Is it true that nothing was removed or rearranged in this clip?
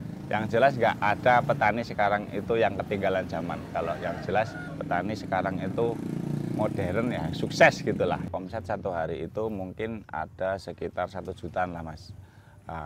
no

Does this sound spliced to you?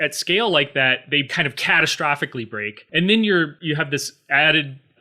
yes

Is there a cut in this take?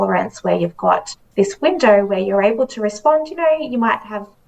yes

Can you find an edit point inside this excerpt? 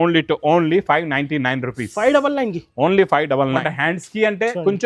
yes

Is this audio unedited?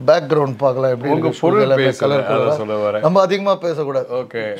yes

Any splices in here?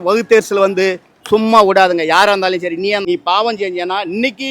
yes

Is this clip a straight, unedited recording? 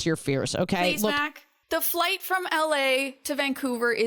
yes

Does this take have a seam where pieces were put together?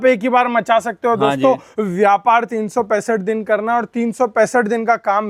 no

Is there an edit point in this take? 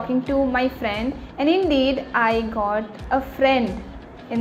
no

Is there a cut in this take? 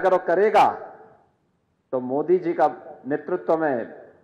no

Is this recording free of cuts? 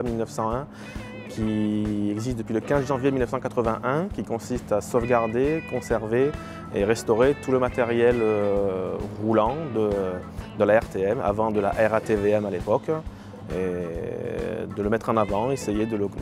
no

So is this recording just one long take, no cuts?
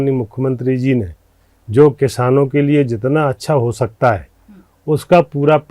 yes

